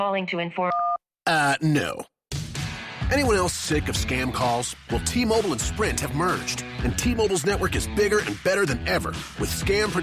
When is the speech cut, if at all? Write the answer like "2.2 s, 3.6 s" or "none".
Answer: none